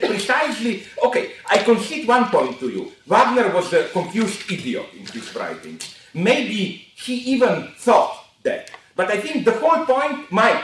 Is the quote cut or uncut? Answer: cut